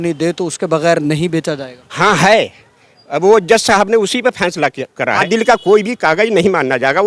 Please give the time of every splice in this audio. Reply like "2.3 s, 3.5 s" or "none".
5.2 s